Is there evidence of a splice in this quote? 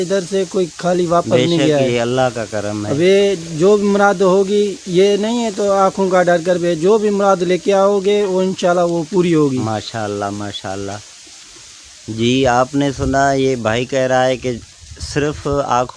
no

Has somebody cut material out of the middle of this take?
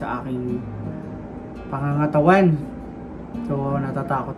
no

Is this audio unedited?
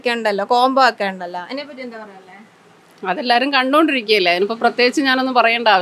yes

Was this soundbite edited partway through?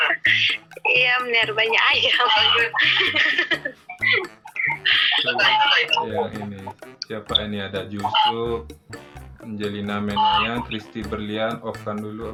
no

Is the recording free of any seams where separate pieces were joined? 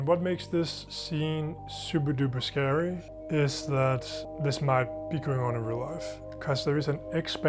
no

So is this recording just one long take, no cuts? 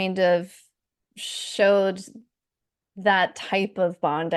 yes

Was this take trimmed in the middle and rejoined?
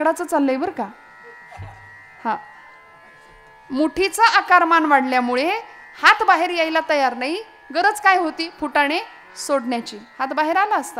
no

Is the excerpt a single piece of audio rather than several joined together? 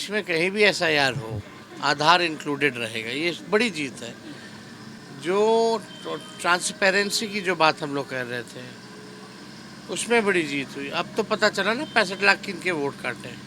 yes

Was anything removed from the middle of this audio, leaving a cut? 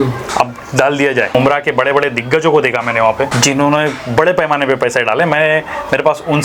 yes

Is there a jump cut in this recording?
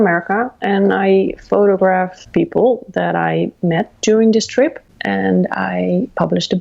yes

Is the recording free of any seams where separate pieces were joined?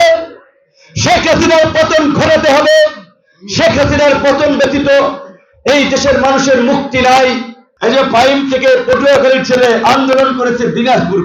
no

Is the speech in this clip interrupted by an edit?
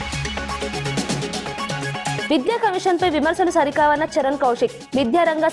no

